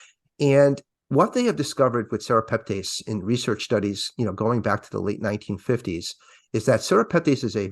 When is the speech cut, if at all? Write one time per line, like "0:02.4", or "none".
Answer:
none